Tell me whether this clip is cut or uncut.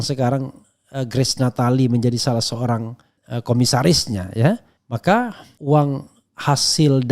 cut